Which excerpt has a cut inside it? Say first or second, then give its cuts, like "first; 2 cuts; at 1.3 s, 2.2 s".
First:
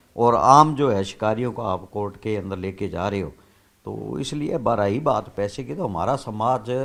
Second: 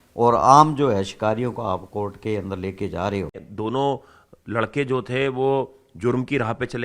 second; 1 cut; at 3.5 s